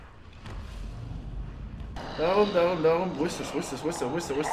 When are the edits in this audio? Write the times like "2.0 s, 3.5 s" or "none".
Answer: 2.0 s